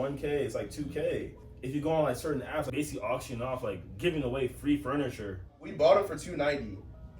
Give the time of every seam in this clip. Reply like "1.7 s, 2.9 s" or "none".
2.7 s, 5.7 s